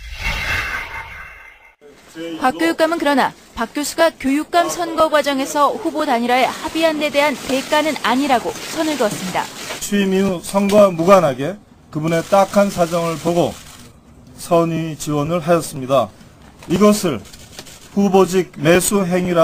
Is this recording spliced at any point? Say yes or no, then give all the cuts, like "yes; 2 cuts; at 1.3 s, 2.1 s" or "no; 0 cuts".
no; 0 cuts